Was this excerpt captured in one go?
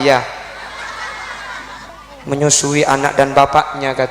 no; 1 cut; at 2.0 s

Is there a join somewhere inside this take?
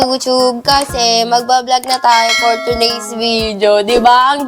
no; 0 cuts

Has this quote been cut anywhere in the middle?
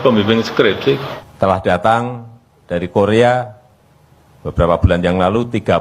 yes; 1 cut; at 1.2 s

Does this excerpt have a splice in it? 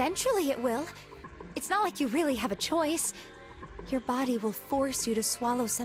no; 0 cuts

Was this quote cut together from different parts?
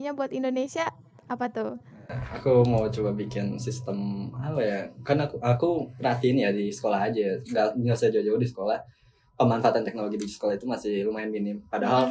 no; 0 cuts

